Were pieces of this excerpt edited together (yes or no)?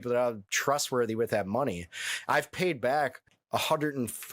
yes